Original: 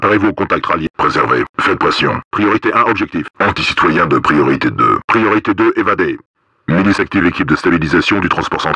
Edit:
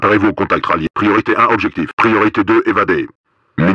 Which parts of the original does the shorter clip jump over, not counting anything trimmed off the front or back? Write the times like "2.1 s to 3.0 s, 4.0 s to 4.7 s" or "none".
0.9 s to 2.3 s, 3.3 s to 5.0 s